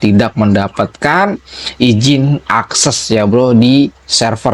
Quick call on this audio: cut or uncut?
uncut